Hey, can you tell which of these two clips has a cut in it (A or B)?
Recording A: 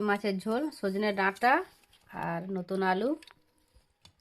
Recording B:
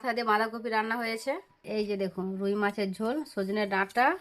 B